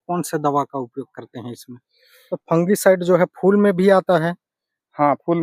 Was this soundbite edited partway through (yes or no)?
yes